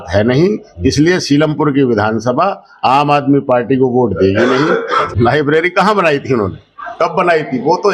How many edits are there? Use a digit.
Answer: 1